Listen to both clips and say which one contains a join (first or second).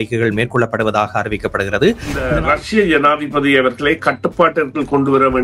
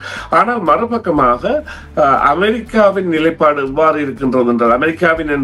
first